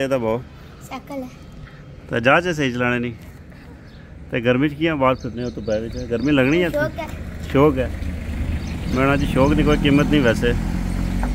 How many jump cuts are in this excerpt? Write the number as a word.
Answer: zero